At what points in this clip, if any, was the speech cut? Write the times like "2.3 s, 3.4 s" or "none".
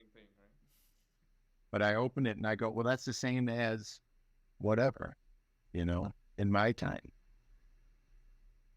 none